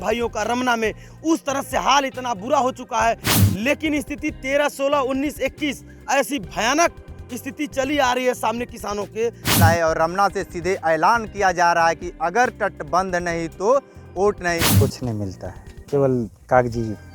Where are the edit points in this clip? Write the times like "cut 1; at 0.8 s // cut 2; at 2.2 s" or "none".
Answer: cut 1; at 3.3 s // cut 2; at 9.6 s // cut 3; at 14.6 s